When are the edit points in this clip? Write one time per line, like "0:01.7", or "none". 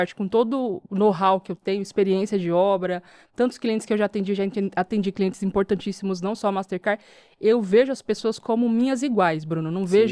none